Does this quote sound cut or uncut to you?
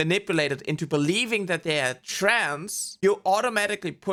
uncut